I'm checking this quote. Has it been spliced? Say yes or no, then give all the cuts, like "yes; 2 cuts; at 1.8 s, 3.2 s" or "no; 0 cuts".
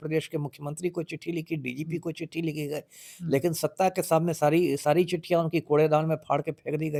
no; 0 cuts